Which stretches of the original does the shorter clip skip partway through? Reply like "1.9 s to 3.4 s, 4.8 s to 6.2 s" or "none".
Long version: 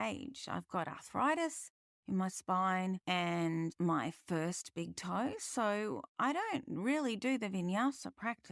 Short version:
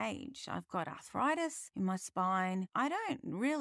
1.6 s to 2.0 s, 3.0 s to 6.1 s